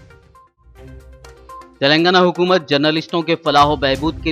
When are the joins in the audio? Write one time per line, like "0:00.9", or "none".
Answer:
0:01.6